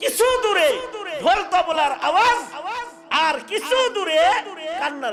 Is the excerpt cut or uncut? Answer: uncut